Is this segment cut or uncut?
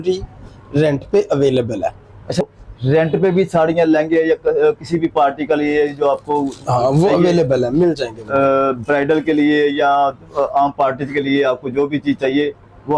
cut